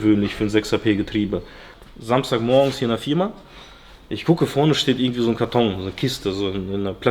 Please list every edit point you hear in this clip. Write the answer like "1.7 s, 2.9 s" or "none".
1.7 s